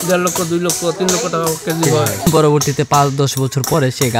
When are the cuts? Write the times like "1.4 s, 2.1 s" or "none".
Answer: 2.3 s